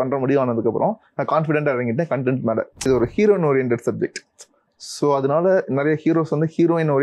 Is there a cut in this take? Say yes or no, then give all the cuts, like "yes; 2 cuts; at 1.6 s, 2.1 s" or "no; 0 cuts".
yes; 1 cut; at 2.8 s